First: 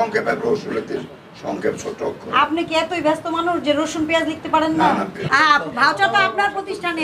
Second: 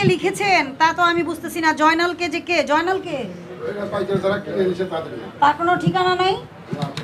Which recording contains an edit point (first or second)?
first